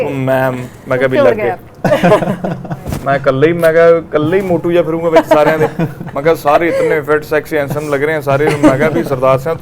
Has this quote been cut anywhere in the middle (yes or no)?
no